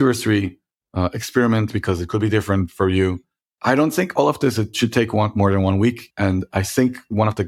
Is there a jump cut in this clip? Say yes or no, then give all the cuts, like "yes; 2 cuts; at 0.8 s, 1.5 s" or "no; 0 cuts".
yes; 1 cut; at 6.1 s